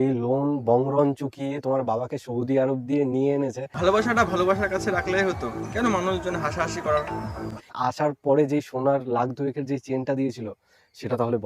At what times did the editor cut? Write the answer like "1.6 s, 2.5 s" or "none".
3.7 s, 7.6 s